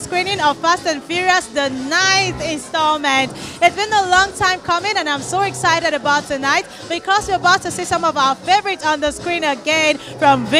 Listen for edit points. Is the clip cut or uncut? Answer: uncut